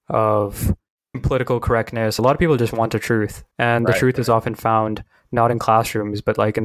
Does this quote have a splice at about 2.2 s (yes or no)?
yes